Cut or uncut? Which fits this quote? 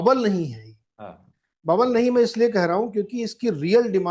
uncut